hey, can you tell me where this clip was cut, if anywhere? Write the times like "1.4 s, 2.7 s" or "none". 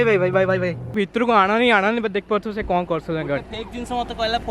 0.9 s